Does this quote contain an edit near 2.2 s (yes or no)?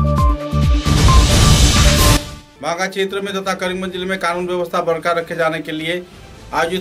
yes